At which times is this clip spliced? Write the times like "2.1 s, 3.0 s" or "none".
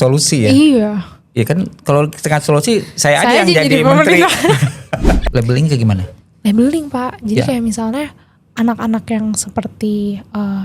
5.2 s